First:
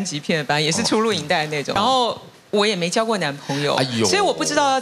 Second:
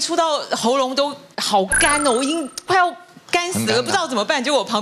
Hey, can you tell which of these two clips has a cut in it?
first; 1 cut; at 1.8 s

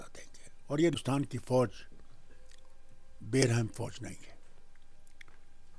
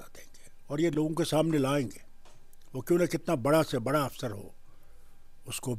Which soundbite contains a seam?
first; 1 cut; at 0.9 s

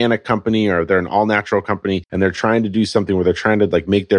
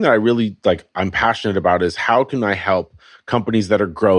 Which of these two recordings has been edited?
first; 1 cut; at 2.1 s

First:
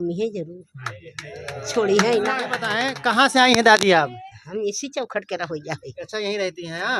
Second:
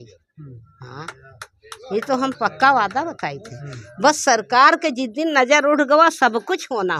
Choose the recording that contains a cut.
first; 1 cut; at 2.9 s

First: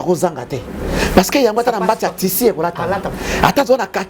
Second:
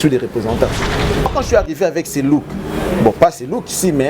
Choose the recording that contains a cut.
second; 1 cut; at 1.3 s

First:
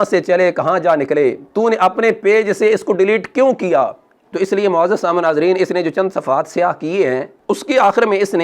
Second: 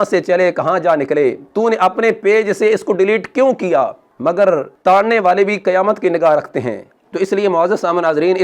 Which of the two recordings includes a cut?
first; 1 cut; at 4.1 s

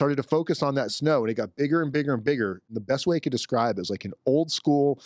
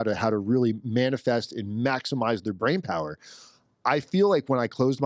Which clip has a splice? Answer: first; 1 cut; at 2.6 s

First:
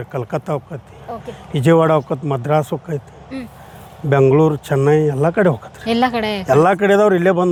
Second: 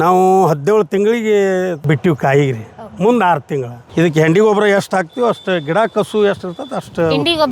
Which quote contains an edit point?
second; 1 cut; at 3.8 s

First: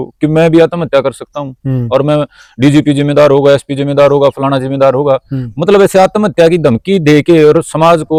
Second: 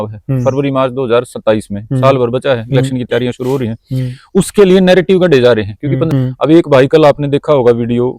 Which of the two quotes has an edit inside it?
second; 1 cut; at 6.0 s

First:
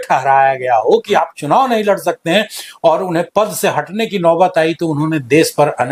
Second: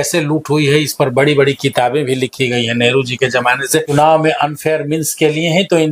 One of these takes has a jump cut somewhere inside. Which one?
second; 1 cut; at 3.9 s

